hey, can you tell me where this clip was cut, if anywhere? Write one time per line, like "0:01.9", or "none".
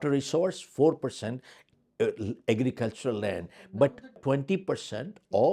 0:04.2